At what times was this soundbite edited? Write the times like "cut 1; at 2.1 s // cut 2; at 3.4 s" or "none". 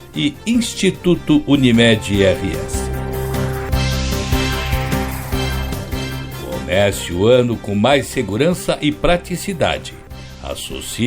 cut 1; at 2.7 s // cut 2; at 5.2 s // cut 3; at 6.5 s